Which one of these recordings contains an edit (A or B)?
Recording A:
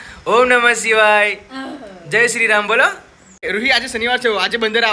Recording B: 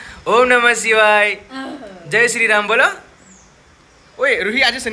A